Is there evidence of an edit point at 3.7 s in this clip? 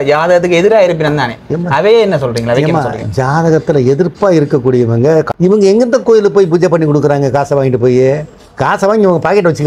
no; 1 cut; at 5.3 s

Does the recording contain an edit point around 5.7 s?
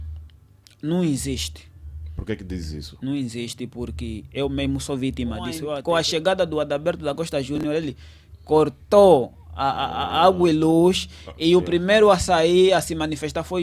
yes; 1 cut; at 5.7 s

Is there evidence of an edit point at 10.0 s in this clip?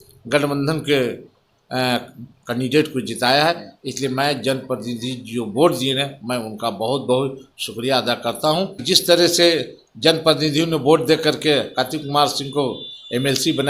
no; 1 cut; at 8.8 s

